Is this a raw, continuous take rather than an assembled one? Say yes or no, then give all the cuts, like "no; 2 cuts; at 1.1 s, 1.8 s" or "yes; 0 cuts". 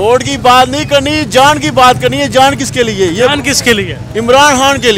yes; 0 cuts